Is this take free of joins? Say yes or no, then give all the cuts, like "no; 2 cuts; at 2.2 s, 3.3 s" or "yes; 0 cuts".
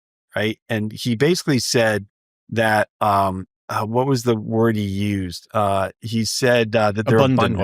yes; 0 cuts